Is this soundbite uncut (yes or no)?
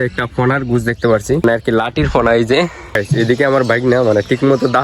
no